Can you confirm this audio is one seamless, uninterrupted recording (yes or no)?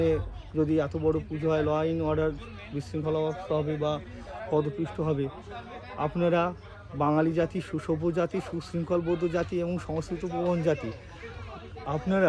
yes